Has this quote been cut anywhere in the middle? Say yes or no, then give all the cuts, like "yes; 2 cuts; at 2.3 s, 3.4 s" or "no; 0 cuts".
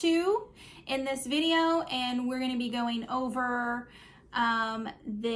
no; 0 cuts